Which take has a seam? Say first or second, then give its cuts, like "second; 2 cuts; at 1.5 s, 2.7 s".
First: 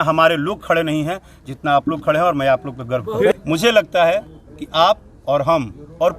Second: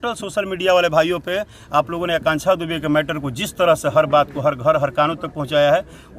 first; 1 cut; at 3.3 s